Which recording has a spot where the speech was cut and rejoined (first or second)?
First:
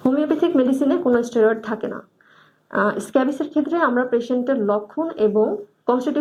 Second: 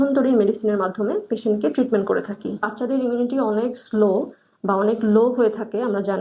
second